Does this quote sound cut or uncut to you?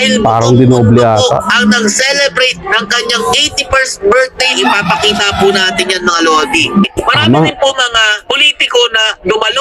cut